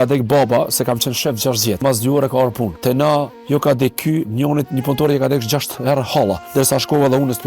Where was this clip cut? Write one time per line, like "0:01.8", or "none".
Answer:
0:01.8
0:02.7
0:06.4